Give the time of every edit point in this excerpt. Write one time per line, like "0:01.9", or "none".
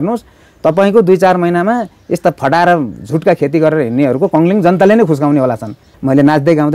0:05.9